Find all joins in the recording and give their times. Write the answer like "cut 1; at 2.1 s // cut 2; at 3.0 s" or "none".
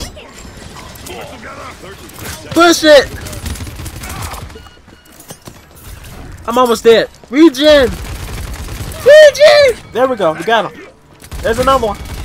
cut 1; at 9.8 s